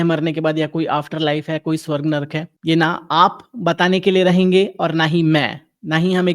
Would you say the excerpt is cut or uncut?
uncut